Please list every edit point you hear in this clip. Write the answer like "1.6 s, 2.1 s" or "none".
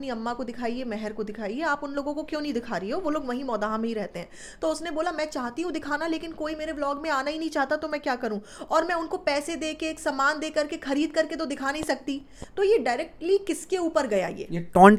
none